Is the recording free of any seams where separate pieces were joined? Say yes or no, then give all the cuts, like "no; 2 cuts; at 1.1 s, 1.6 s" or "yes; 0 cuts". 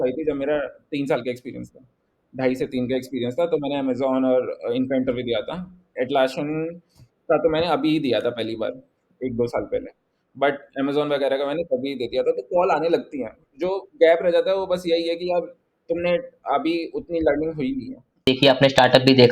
no; 1 cut; at 18.3 s